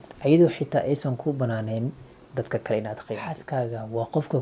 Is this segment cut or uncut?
cut